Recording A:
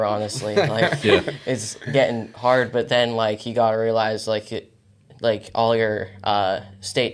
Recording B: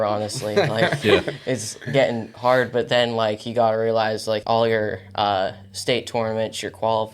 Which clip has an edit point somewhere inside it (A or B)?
B